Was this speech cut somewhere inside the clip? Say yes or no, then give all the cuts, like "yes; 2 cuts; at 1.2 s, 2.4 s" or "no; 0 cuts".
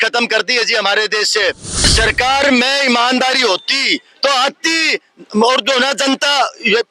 yes; 1 cut; at 1.8 s